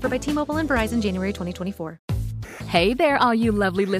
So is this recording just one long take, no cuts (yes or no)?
no